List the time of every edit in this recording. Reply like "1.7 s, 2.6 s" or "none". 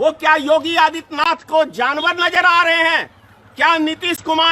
none